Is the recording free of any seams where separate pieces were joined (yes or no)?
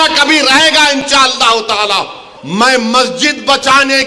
no